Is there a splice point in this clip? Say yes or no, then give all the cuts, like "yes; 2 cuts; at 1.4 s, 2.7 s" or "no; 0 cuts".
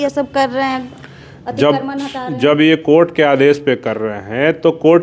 no; 0 cuts